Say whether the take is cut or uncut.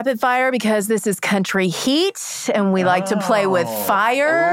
uncut